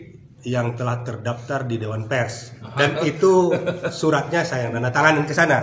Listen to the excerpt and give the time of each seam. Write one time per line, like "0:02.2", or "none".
0:02.7